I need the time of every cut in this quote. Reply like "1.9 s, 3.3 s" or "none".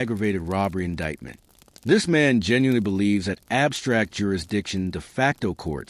none